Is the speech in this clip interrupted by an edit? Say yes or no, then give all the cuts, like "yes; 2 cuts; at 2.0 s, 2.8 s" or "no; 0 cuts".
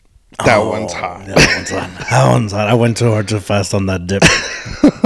no; 0 cuts